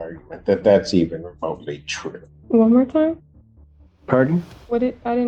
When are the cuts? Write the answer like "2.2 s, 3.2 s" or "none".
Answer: 2.3 s